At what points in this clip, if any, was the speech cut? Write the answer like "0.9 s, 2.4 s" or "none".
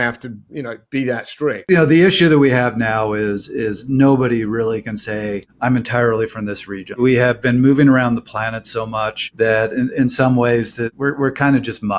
1.6 s, 5.5 s, 7.0 s, 9.2 s, 10.9 s